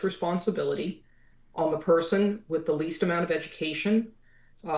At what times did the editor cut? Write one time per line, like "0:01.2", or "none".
none